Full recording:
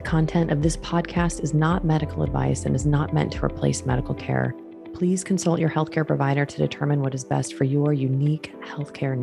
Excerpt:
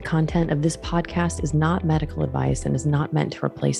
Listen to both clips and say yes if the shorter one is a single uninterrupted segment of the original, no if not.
yes